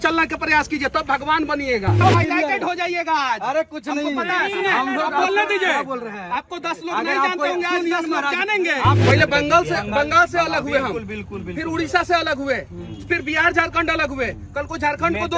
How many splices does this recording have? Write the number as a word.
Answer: two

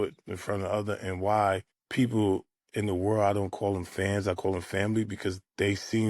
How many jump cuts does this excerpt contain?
one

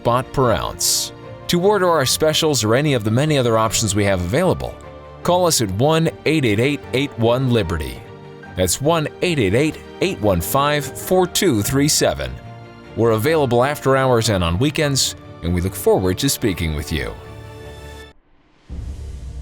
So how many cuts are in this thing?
one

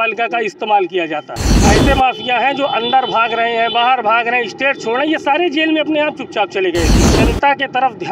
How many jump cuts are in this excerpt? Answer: two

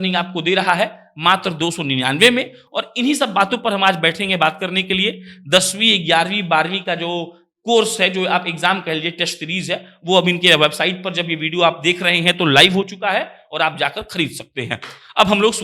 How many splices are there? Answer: zero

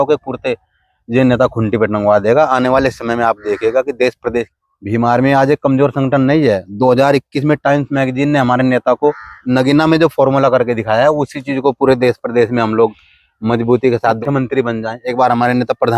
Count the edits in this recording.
three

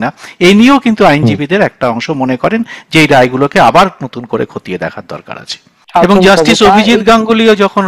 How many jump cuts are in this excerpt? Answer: one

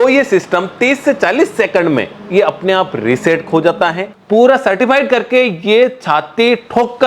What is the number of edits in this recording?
one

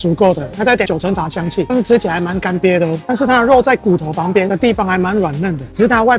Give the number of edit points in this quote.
zero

